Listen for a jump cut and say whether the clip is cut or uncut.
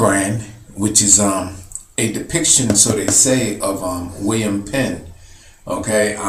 uncut